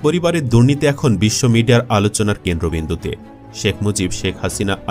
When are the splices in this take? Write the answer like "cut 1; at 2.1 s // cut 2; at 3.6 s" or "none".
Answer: none